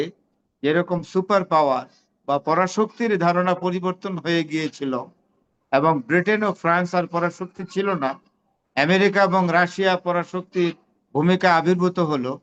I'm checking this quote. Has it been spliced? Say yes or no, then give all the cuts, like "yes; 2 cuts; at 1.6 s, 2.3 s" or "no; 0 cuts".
no; 0 cuts